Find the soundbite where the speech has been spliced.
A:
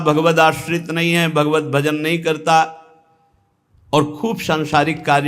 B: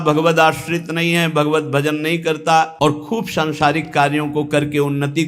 B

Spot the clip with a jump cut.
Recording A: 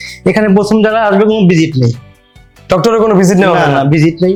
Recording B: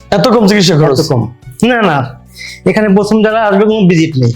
B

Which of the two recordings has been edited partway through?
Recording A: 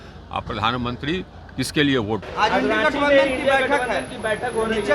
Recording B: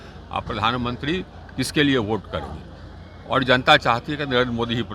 A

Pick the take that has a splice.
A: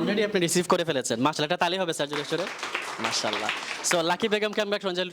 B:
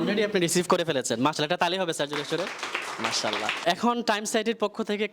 B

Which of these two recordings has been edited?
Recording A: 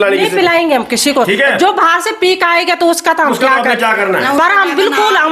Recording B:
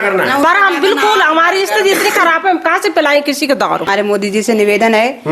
B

